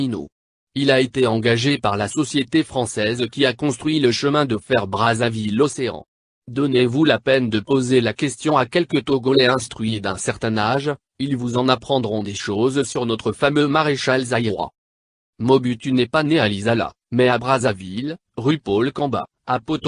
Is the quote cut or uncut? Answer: cut